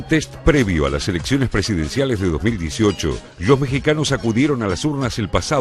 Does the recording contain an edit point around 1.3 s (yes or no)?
yes